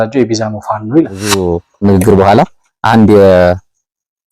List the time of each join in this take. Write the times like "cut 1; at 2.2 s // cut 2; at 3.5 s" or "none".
cut 1; at 1.4 s